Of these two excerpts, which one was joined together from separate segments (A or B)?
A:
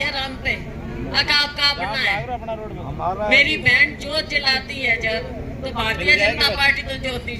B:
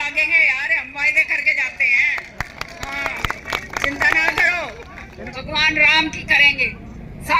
B